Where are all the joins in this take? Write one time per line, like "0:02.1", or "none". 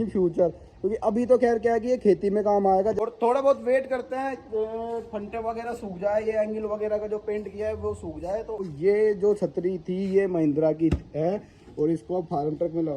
0:03.0
0:08.6